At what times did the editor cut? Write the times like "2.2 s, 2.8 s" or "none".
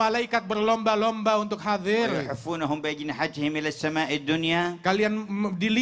none